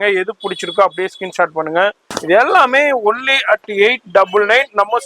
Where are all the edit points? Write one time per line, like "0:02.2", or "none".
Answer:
0:02.1